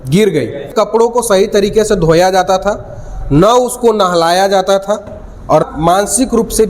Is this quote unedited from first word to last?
no; 2 cuts; at 0.7 s, 5.6 s

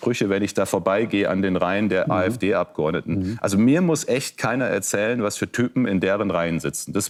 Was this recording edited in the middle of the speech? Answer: no; 0 cuts

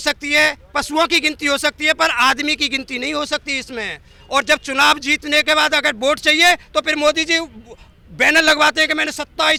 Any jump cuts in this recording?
no; 0 cuts

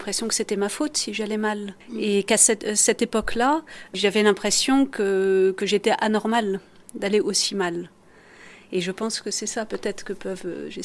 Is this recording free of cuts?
no; 2 cuts; at 1.8 s, 3.9 s

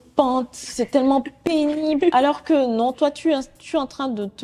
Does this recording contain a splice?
no; 0 cuts

